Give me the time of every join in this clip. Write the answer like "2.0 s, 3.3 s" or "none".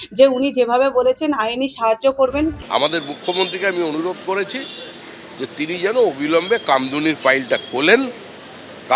2.6 s